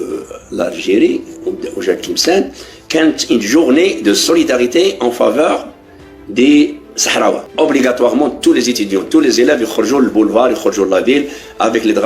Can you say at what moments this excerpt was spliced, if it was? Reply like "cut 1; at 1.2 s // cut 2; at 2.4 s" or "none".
cut 1; at 7.4 s